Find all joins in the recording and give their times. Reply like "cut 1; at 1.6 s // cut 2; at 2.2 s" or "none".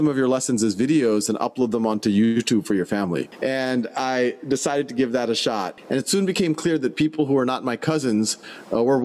cut 1; at 3.3 s // cut 2; at 5.7 s